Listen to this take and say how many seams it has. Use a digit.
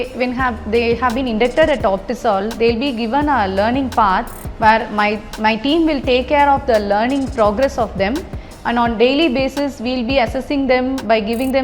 0